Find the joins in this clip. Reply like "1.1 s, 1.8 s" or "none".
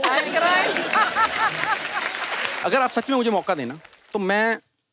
2.5 s